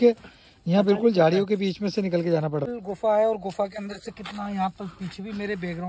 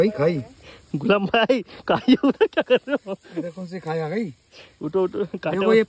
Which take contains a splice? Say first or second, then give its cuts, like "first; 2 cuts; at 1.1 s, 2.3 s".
first; 1 cut; at 2.7 s